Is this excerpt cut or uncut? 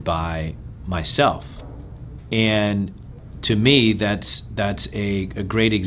uncut